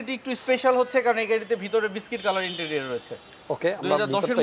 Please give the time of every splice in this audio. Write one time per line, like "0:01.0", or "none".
none